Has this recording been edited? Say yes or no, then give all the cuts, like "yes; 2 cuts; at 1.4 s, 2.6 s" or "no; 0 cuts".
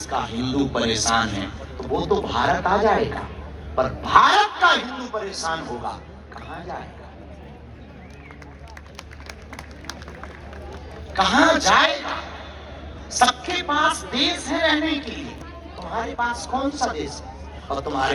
no; 0 cuts